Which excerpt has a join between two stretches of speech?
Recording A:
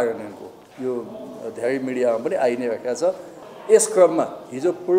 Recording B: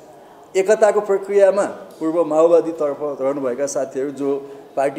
A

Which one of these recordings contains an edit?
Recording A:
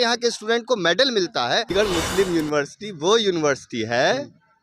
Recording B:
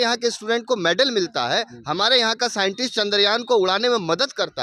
A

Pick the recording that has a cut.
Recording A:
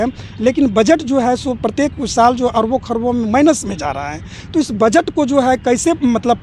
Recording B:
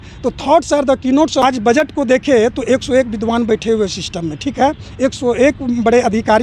B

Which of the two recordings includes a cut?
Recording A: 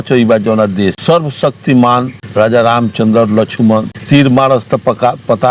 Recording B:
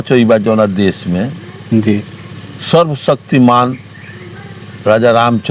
A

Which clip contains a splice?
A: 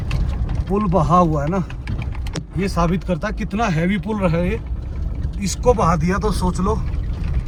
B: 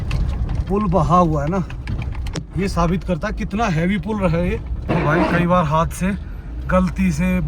B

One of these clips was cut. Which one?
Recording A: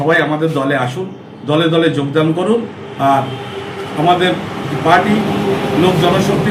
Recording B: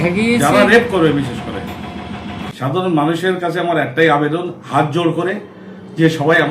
B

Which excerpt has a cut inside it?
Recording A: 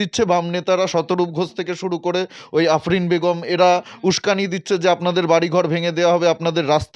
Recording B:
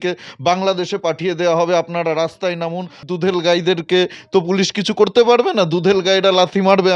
B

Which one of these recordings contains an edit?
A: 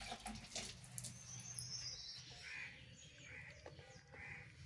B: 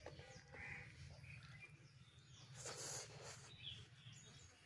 A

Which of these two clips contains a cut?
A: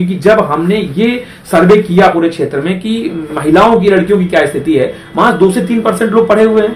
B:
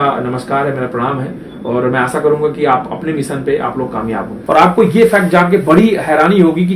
B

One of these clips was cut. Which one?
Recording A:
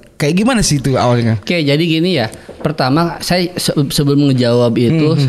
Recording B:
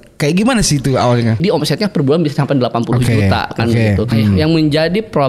B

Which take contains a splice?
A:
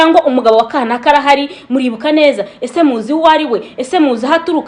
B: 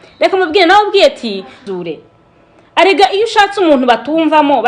B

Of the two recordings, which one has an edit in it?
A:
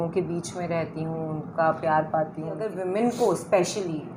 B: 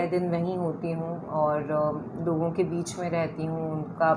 A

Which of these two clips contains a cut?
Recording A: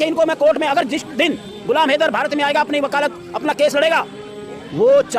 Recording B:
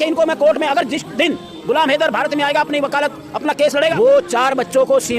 B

